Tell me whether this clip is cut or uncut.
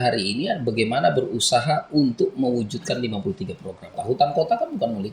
cut